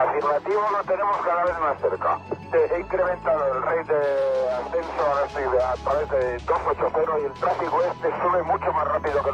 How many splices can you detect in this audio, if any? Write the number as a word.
zero